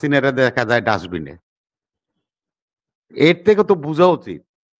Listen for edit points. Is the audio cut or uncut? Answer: uncut